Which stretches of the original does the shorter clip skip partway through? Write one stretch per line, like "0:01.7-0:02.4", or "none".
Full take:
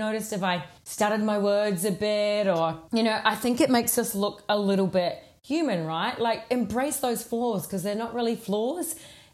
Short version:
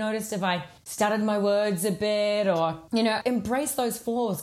0:03.2-0:06.4